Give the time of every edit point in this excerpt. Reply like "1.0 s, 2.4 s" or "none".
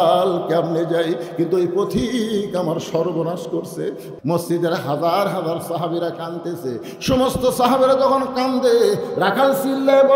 4.1 s

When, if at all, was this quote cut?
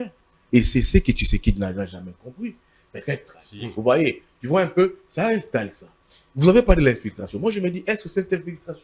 3.4 s

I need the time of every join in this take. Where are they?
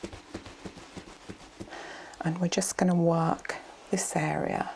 1.8 s

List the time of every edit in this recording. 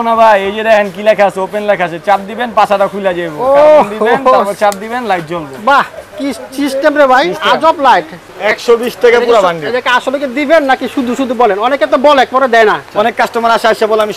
8.2 s, 12.8 s

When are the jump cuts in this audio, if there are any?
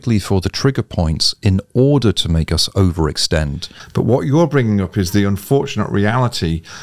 3.8 s

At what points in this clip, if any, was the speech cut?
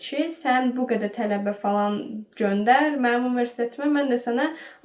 none

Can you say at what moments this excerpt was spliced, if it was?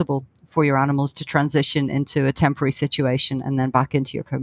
none

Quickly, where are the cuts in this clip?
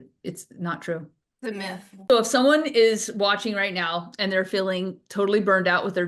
2.1 s

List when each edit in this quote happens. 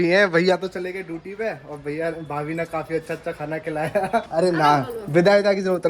4.3 s

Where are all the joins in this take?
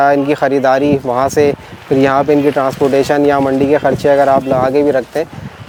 none

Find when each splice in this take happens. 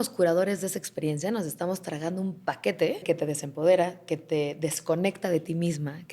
3.0 s

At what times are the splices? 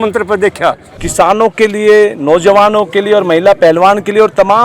1.0 s

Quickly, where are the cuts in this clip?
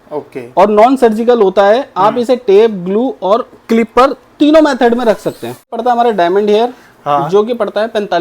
5.7 s

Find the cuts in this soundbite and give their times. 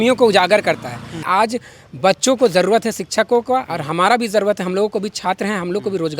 1.3 s

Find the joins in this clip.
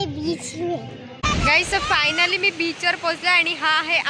1.2 s

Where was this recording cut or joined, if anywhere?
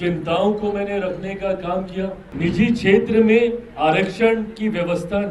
2.2 s

